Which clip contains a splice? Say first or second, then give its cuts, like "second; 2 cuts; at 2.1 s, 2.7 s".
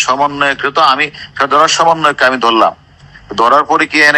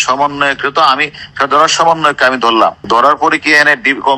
second; 1 cut; at 2.8 s